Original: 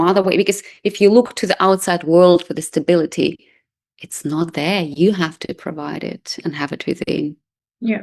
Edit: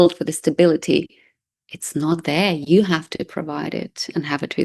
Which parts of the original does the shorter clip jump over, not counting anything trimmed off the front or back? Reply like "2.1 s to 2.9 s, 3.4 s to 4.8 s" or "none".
none